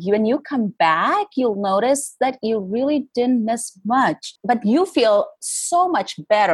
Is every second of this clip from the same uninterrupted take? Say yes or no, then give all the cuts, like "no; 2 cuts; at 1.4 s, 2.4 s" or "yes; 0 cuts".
no; 1 cut; at 4.3 s